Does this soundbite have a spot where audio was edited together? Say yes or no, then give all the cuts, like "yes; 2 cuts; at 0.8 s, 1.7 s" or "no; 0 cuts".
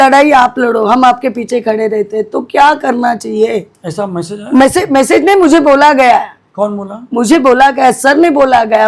no; 0 cuts